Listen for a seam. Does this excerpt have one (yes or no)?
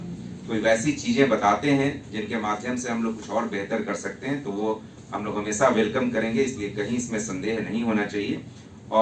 no